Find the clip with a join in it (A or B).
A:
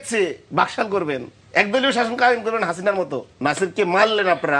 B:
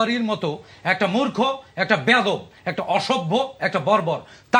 A